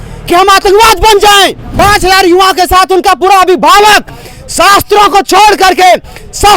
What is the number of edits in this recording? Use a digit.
1